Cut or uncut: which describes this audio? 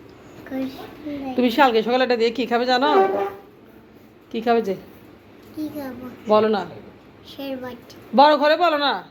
uncut